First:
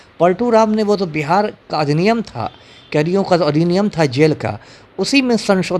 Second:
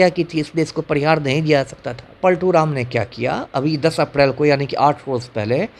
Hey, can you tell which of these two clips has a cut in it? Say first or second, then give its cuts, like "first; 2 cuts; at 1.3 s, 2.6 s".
second; 1 cut; at 2.2 s